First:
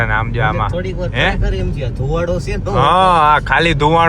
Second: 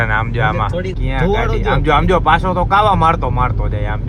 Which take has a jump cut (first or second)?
second